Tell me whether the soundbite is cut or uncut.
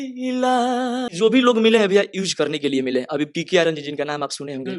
cut